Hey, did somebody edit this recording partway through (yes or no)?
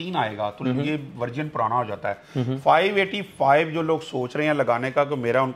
no